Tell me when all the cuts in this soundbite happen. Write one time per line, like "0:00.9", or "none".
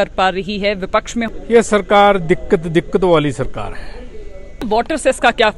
0:01.3
0:04.6